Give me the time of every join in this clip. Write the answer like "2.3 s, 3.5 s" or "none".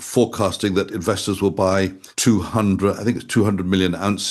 2.0 s